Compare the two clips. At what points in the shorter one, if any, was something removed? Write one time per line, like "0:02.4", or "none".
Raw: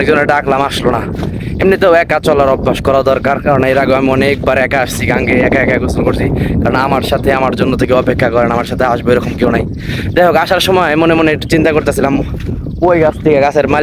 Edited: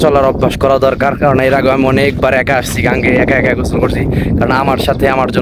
none

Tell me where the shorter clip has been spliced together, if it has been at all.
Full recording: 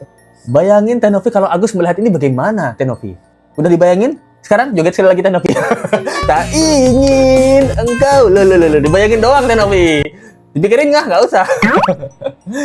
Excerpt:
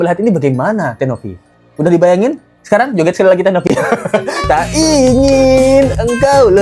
none

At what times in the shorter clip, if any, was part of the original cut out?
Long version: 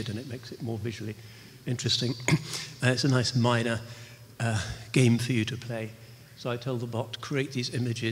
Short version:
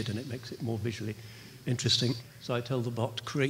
0:02.2

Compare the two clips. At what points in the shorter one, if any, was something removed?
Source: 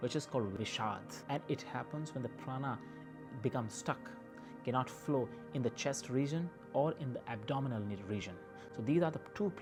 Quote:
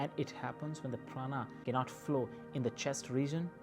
0:01.5

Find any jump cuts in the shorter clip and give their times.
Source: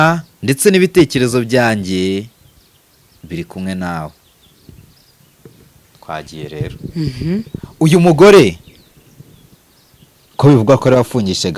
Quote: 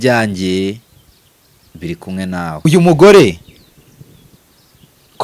0:02.7

